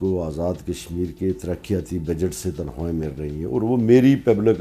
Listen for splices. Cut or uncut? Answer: uncut